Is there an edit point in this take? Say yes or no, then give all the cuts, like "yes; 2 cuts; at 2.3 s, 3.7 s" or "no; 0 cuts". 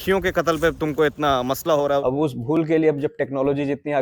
yes; 1 cut; at 2.0 s